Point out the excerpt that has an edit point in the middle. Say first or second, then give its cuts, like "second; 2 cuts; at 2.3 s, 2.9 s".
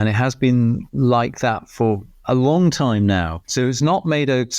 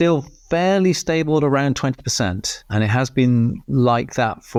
first; 1 cut; at 3.4 s